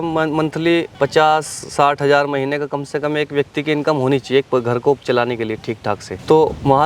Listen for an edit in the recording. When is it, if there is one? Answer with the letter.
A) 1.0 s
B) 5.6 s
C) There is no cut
C